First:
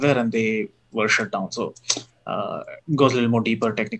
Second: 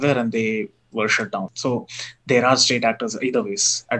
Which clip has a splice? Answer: second; 1 cut; at 1.5 s

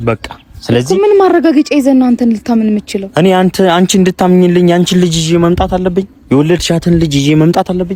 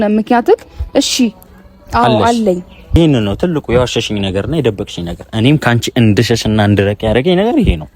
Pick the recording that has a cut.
second; 1 cut; at 3.0 s

